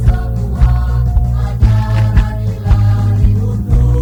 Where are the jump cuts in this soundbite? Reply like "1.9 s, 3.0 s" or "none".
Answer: none